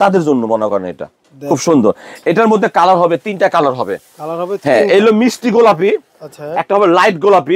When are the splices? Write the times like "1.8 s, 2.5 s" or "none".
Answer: none